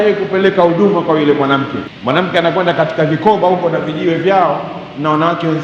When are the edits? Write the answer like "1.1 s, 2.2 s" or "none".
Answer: 1.9 s